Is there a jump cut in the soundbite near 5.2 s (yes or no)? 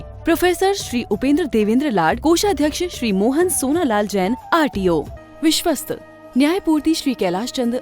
yes